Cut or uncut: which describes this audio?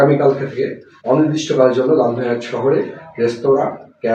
uncut